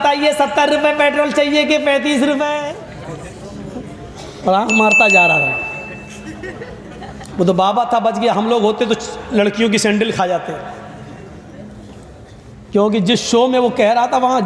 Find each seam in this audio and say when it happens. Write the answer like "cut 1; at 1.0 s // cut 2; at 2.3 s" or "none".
cut 1; at 2.6 s